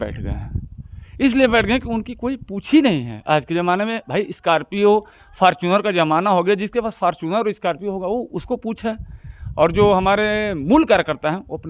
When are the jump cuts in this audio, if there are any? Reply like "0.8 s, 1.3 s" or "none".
none